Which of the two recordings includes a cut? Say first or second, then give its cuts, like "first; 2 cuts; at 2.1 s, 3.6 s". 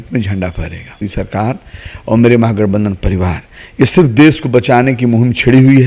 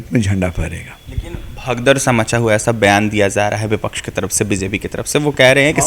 first; 1 cut; at 1.0 s